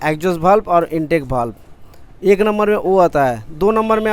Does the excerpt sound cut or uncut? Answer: uncut